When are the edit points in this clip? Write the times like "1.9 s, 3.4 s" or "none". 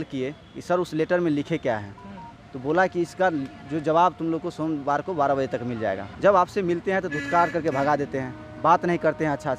6.1 s